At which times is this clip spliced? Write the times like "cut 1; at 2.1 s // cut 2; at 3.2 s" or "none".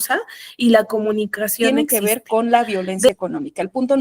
cut 1; at 1.7 s